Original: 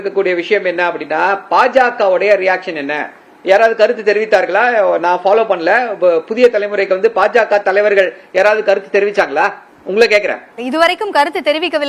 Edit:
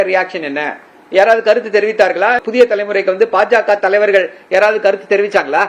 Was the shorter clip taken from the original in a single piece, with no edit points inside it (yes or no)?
no